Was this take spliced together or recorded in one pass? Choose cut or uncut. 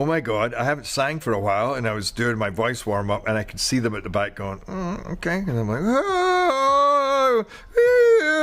uncut